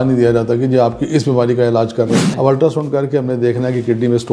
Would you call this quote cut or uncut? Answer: cut